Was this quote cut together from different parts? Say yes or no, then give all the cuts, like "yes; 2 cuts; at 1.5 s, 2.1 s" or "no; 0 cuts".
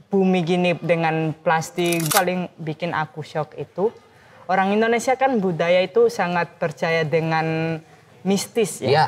yes; 1 cut; at 2.1 s